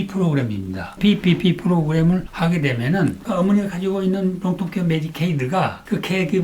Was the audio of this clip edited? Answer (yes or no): yes